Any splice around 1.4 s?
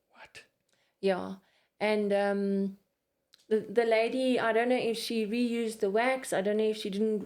no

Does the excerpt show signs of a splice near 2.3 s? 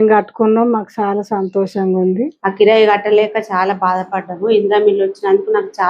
yes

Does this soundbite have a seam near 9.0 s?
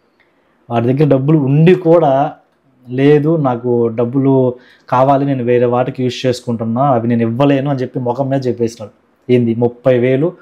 no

